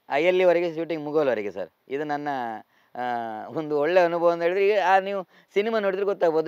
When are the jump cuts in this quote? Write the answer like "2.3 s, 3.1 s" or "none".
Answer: none